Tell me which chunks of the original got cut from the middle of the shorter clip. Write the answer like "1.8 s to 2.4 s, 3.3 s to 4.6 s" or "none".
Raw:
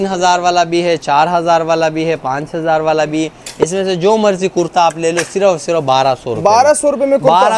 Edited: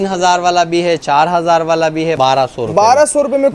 2.2 s to 5.8 s